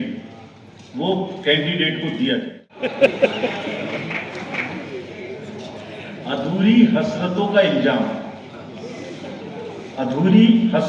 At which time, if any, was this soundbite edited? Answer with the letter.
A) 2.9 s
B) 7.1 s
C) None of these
A